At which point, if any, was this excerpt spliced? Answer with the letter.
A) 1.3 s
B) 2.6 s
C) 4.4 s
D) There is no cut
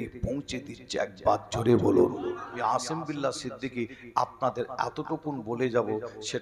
B